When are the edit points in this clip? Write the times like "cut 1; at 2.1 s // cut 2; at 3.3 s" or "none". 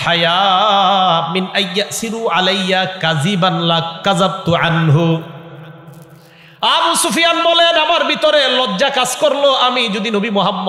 none